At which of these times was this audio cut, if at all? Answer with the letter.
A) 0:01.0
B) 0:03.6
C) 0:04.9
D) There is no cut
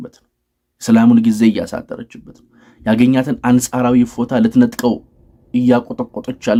D